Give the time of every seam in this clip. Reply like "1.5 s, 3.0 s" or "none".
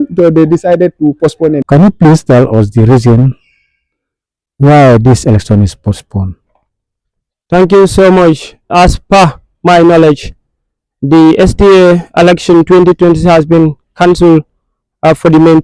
1.6 s, 8.7 s